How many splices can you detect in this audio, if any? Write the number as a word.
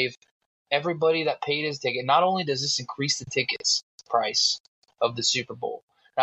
zero